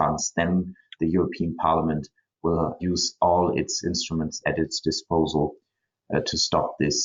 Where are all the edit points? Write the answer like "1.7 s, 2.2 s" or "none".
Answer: 2.8 s, 4.4 s